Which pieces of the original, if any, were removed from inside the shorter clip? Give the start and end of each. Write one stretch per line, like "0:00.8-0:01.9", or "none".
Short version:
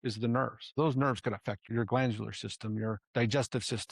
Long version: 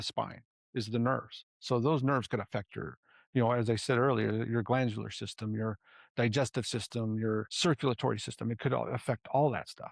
0:01.5-0:01.8
0:02.8-0:04.5
0:05.8-0:06.1